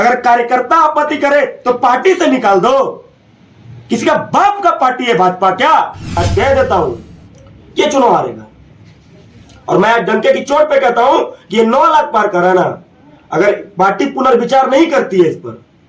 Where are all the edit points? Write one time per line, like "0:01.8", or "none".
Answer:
0:06.2